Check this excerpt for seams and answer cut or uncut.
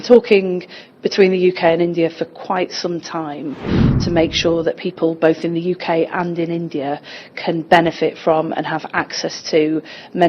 cut